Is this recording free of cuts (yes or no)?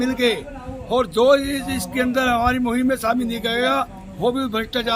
yes